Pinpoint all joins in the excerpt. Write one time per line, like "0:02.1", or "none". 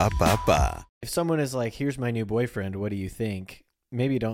0:00.9